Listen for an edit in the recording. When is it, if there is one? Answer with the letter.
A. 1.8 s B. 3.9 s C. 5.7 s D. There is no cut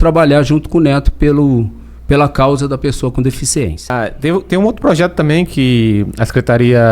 B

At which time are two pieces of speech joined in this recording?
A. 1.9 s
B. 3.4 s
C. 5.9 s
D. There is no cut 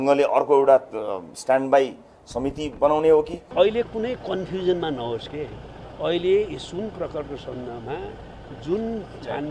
B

